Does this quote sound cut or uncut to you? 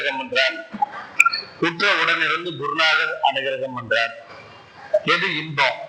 cut